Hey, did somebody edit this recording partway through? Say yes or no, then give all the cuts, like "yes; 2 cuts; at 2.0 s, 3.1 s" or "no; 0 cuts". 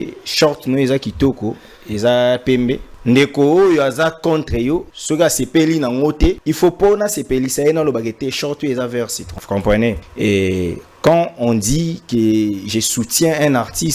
yes; 5 cuts; at 2.9 s, 4.9 s, 6.5 s, 9.3 s, 10.1 s